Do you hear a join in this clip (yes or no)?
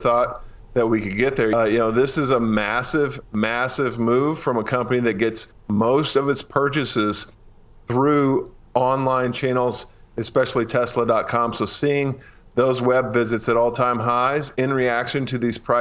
yes